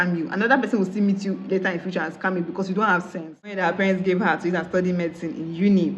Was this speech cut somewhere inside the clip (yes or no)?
yes